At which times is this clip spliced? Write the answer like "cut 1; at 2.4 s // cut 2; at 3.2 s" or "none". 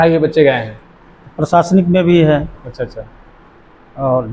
none